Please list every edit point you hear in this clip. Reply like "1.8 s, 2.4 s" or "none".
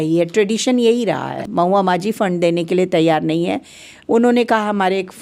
1.5 s